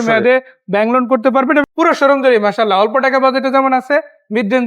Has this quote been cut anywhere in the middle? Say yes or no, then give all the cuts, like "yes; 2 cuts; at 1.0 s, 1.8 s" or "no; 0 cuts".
yes; 1 cut; at 1.6 s